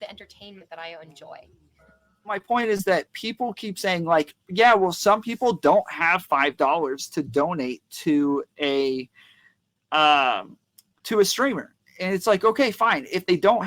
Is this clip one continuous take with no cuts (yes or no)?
no